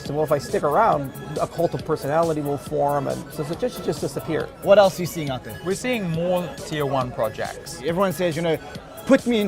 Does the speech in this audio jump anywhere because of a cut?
yes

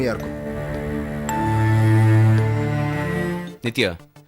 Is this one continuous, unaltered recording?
no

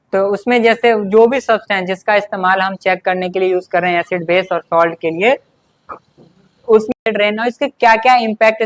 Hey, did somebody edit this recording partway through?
yes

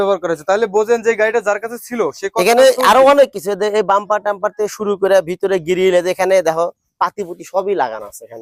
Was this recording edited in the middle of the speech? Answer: no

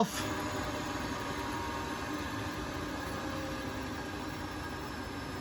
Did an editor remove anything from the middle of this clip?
no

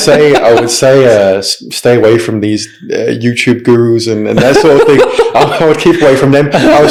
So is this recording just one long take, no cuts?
yes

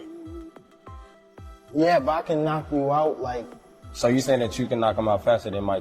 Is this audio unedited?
yes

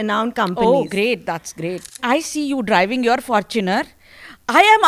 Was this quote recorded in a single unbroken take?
no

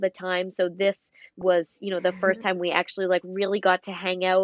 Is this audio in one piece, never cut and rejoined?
yes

